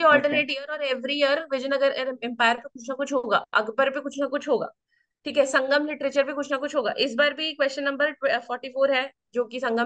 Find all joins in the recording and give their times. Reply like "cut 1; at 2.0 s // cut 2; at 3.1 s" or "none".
none